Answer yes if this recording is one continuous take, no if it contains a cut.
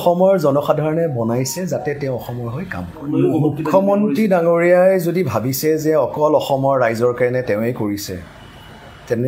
no